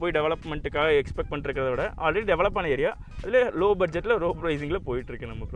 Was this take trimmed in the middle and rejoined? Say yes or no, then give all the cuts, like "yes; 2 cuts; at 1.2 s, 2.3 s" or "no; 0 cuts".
no; 0 cuts